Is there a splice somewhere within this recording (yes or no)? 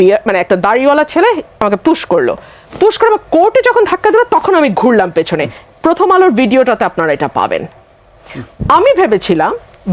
no